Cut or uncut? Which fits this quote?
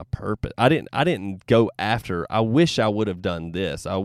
uncut